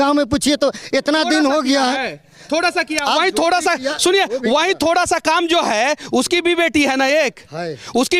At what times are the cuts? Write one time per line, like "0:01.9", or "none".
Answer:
none

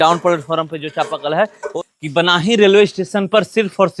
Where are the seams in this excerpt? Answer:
0:01.6

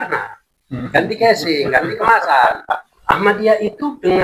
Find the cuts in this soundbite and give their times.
0:02.9

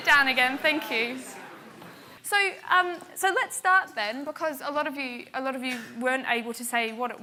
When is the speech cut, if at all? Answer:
none

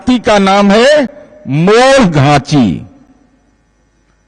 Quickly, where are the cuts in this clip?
none

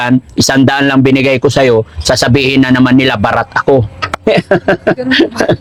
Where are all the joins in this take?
none

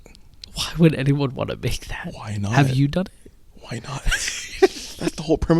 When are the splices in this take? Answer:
none

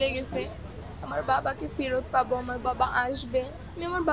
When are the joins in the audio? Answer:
none

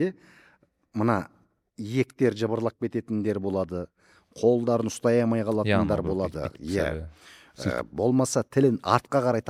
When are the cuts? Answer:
none

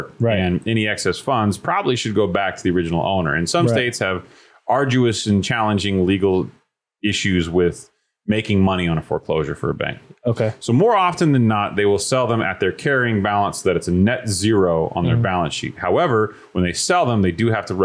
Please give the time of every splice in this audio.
none

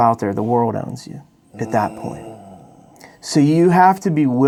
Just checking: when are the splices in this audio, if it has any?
none

